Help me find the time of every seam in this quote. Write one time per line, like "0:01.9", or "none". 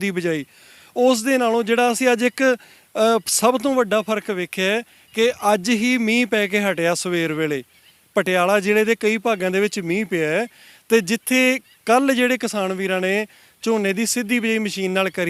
none

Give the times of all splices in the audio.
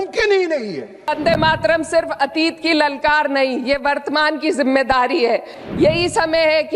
0:01.1
0:05.6

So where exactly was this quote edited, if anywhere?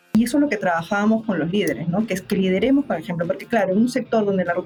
none

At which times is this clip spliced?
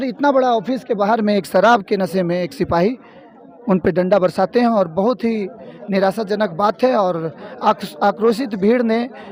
none

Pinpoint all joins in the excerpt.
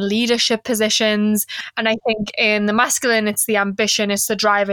0:01.7

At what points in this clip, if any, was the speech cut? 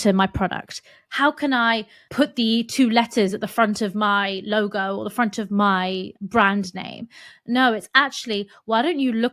0:02.0
0:06.1

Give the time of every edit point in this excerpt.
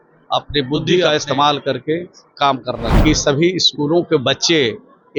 0:01.0
0:02.9

